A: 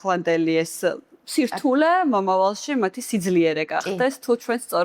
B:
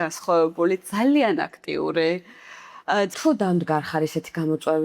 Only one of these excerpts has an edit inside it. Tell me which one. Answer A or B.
B